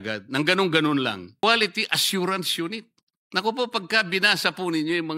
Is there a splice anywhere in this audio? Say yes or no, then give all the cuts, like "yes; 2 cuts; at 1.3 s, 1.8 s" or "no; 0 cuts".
yes; 1 cut; at 1.4 s